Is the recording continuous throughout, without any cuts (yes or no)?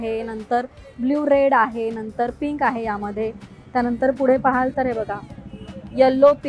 yes